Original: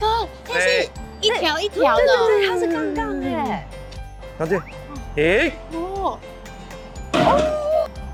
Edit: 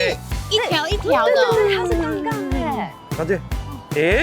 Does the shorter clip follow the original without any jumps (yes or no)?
no